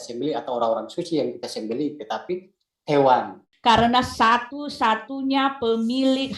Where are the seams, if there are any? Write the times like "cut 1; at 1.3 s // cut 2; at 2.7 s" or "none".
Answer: cut 1; at 3.4 s

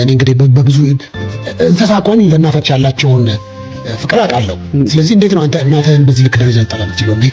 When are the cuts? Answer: none

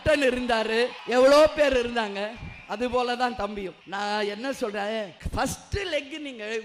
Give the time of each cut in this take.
cut 1; at 1.0 s // cut 2; at 3.8 s // cut 3; at 5.2 s

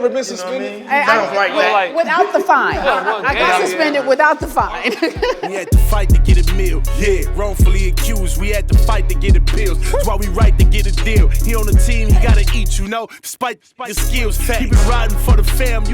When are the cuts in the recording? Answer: cut 1; at 5.5 s

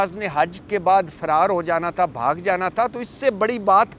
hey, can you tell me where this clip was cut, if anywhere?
none

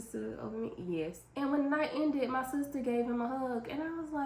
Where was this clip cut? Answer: cut 1; at 1.2 s

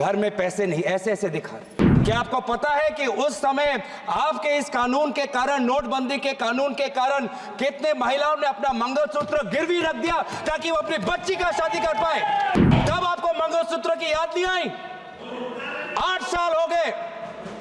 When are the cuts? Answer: cut 1; at 1.9 s // cut 2; at 12.6 s

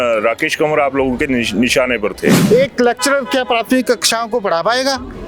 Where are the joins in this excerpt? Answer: cut 1; at 2.4 s

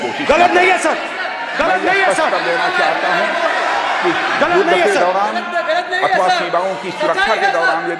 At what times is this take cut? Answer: none

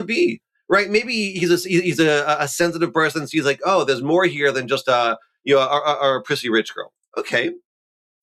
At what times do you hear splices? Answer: none

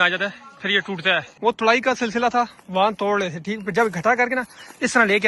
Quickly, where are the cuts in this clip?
cut 1; at 1.3 s

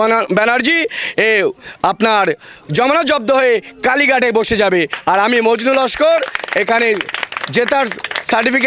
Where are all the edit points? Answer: none

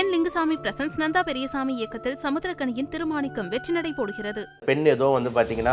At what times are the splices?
cut 1; at 4.6 s

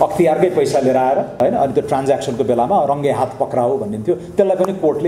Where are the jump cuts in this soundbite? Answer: cut 1; at 1.3 s

